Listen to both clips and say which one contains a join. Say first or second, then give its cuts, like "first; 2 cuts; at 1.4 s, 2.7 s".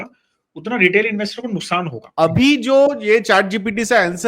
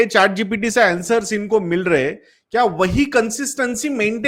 first; 1 cut; at 2.0 s